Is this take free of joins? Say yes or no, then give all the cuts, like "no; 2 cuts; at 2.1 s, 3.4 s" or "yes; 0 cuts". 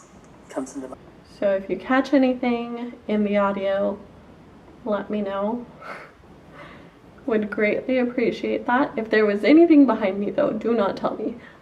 no; 1 cut; at 0.9 s